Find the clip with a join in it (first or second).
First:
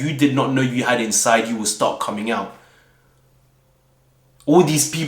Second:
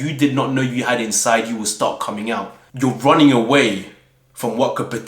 second